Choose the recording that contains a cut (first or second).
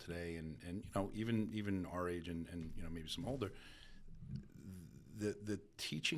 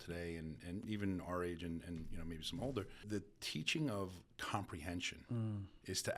second